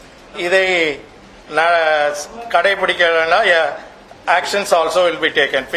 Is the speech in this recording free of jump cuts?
yes; 0 cuts

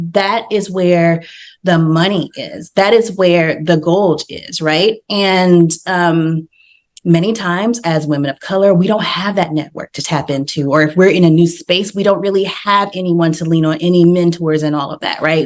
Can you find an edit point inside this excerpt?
no; 0 cuts

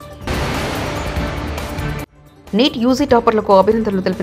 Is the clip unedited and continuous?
yes; 0 cuts

